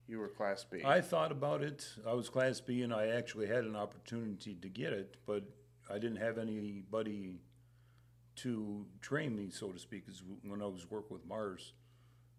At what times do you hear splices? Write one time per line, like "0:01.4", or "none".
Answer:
none

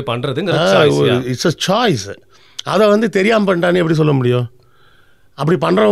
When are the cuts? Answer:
none

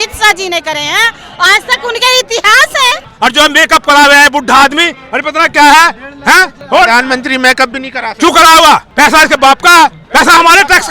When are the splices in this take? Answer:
0:03.0
0:06.5
0:08.9
0:10.0

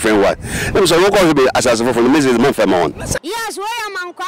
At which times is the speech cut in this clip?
0:03.1

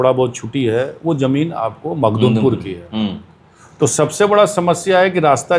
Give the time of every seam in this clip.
none

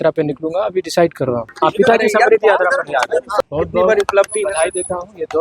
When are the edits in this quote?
0:01.5
0:03.5

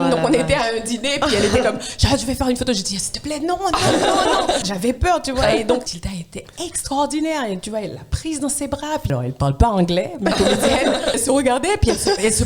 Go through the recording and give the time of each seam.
0:04.7
0:06.0
0:09.1
0:11.2

